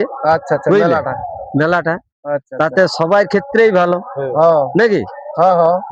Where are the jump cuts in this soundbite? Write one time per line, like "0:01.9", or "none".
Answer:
none